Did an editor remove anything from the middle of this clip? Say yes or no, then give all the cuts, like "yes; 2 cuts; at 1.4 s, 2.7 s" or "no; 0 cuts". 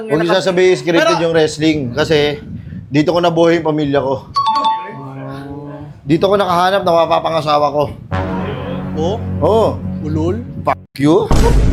no; 0 cuts